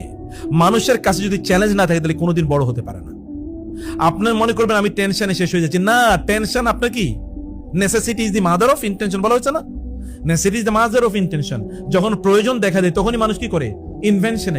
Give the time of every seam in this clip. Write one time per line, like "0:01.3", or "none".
none